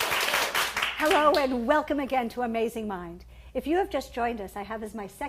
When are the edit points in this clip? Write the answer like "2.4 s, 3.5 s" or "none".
2.7 s